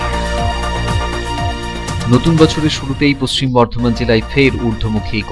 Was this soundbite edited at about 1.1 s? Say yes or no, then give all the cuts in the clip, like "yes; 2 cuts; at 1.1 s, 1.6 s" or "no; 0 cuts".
no; 0 cuts